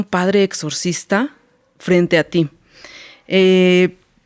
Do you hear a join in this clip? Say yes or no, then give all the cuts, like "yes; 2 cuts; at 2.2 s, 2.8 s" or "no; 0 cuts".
no; 0 cuts